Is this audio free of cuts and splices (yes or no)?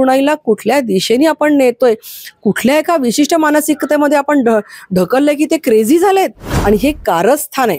no